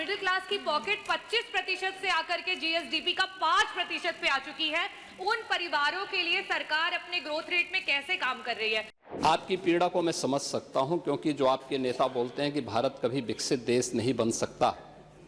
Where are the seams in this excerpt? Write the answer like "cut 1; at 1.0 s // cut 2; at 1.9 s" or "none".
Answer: cut 1; at 9.0 s